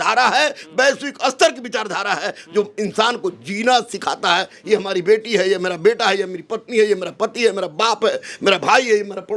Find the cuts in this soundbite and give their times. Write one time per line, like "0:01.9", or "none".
none